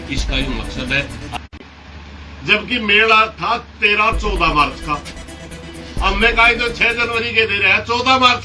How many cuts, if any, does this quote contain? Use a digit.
1